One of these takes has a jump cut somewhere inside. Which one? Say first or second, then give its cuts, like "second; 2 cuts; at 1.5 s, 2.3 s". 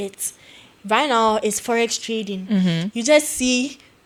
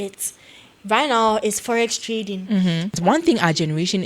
second; 1 cut; at 3.0 s